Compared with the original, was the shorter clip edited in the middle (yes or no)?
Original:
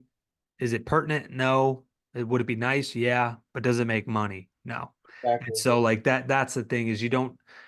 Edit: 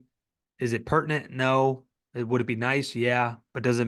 no